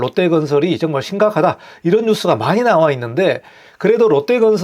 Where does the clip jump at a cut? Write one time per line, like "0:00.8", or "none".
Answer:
none